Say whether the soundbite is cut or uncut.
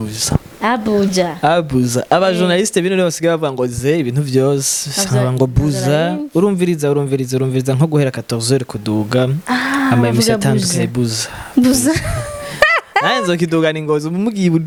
uncut